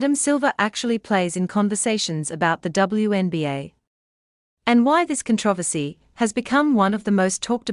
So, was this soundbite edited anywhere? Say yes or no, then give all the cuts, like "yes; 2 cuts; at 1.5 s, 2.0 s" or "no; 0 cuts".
yes; 1 cut; at 6.4 s